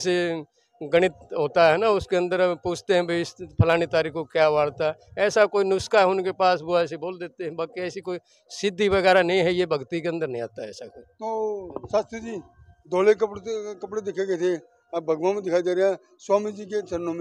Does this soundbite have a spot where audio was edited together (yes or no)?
no